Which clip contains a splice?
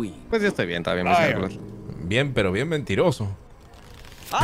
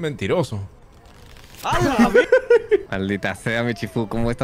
second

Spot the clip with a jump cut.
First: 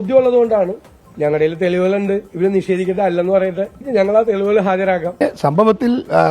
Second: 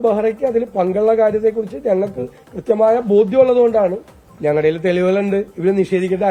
first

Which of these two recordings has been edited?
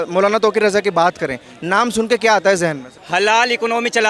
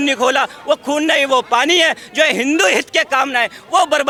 first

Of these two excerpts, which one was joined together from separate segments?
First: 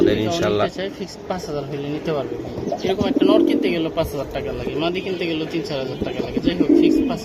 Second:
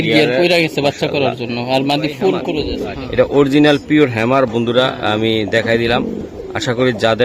second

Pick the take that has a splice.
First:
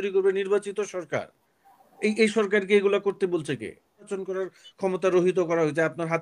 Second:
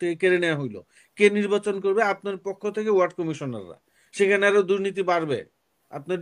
first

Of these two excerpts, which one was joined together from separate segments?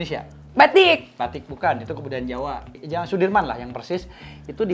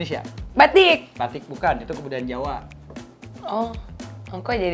first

